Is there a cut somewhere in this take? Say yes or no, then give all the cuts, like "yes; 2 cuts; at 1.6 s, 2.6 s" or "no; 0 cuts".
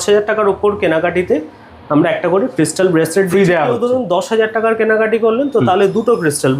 no; 0 cuts